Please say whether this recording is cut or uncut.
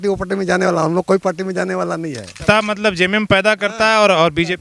cut